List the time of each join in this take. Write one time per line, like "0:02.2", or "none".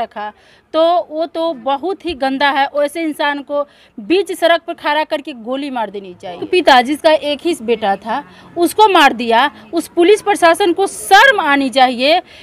0:06.4